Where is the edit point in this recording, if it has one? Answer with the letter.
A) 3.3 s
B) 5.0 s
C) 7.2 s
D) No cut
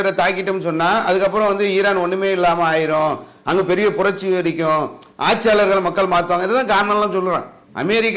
D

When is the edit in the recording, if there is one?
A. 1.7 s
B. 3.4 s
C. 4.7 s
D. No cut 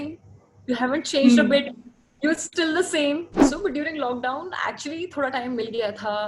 B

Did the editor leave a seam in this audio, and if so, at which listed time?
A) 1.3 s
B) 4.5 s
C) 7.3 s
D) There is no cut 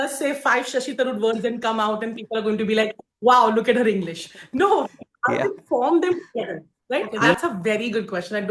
C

